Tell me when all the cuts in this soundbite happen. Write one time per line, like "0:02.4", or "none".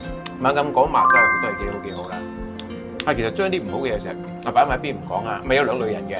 none